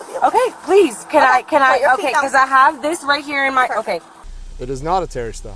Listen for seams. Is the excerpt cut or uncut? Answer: cut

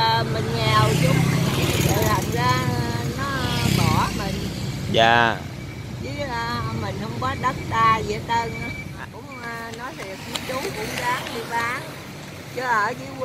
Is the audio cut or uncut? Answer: cut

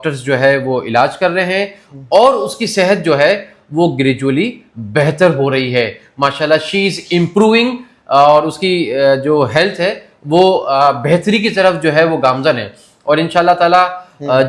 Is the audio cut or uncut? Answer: uncut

